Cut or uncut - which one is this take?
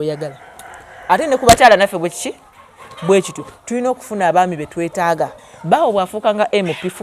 cut